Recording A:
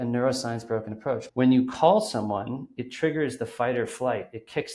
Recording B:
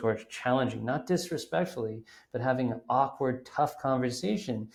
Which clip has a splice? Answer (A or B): A